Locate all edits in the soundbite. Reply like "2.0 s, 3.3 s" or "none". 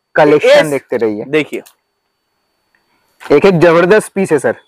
none

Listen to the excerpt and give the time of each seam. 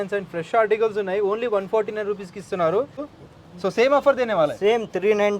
3.1 s

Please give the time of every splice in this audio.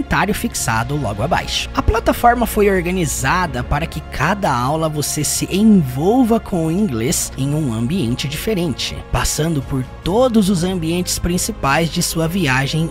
1.6 s

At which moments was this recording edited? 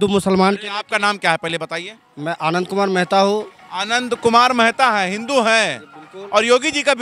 none

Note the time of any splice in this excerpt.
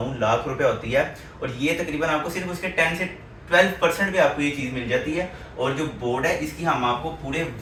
none

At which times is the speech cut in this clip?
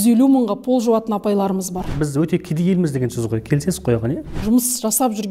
1.9 s, 4.2 s

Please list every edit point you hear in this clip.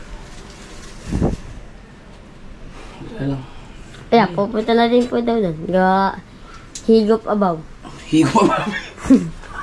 none

